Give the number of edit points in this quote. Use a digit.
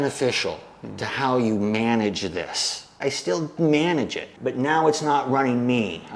1